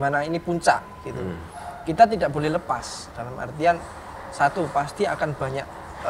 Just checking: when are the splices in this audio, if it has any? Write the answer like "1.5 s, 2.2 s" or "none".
none